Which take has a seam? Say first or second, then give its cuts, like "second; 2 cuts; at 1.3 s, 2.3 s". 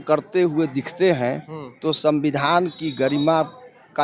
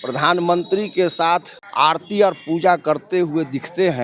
second; 1 cut; at 1.6 s